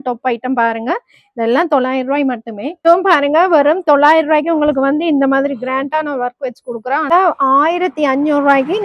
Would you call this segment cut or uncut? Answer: cut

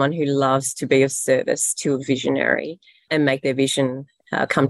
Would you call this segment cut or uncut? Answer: cut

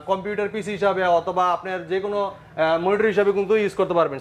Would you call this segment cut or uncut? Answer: uncut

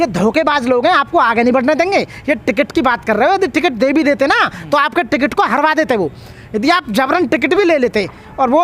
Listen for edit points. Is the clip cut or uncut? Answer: uncut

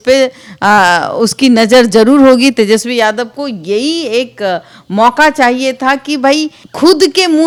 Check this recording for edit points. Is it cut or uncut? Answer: uncut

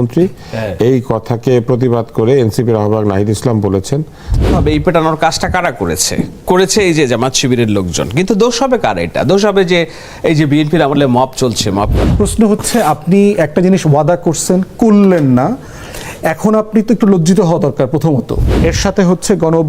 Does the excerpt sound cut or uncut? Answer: cut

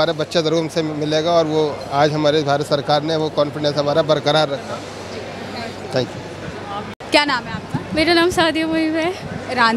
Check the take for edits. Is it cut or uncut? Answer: uncut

